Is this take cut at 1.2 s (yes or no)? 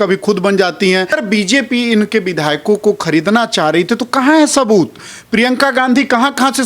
yes